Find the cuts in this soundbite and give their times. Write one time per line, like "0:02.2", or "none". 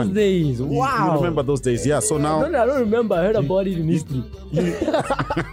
none